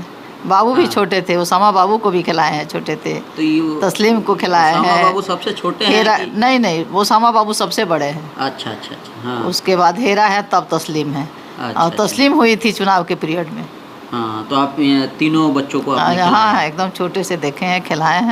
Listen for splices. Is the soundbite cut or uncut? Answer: uncut